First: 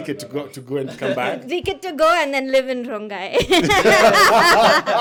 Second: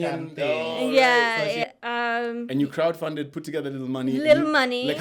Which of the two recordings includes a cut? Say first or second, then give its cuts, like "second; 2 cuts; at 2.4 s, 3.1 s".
second; 1 cut; at 1.6 s